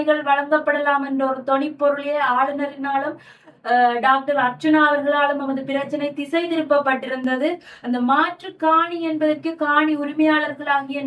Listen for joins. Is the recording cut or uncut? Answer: uncut